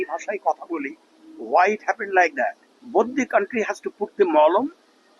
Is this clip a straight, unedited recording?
no; 1 cut; at 2.7 s

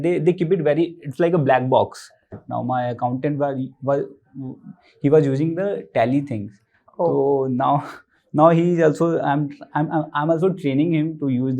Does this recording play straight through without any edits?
no; 1 cut; at 2.4 s

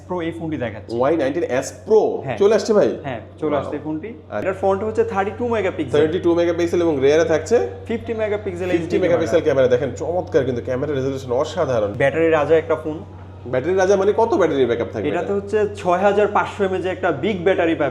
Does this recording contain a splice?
yes; 2 cuts; at 4.4 s, 11.9 s

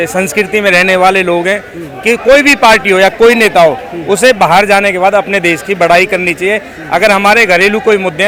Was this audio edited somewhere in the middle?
no; 0 cuts

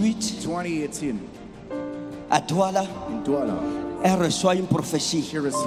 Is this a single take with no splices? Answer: yes; 0 cuts

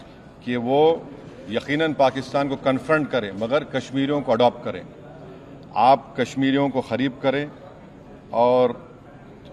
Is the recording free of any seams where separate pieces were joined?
yes; 0 cuts

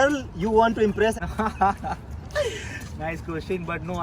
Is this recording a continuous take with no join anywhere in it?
no; 1 cut; at 1.1 s

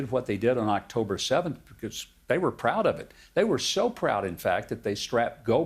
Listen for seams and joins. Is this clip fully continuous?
yes; 0 cuts

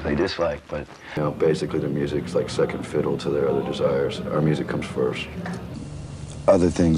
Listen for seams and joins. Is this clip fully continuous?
no; 2 cuts; at 1.2 s, 5.7 s

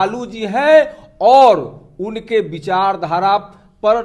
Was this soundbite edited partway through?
no; 0 cuts

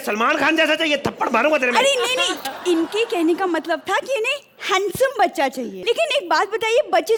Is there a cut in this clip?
no; 0 cuts

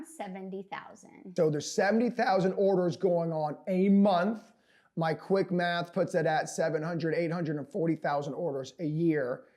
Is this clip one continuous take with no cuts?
no; 1 cut; at 1.2 s

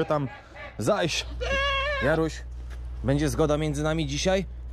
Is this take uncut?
no; 1 cut; at 1.3 s

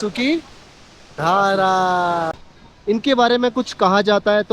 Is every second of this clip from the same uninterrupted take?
no; 1 cut; at 2.3 s

